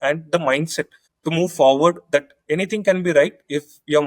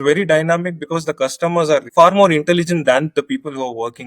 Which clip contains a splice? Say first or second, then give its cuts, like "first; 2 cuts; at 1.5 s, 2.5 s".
second; 1 cut; at 1.9 s